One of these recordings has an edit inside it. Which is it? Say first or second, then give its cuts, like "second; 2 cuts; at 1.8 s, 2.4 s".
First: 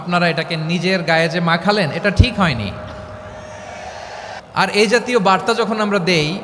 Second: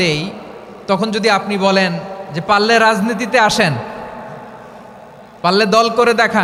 first; 1 cut; at 4.4 s